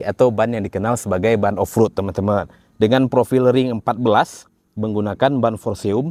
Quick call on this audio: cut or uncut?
uncut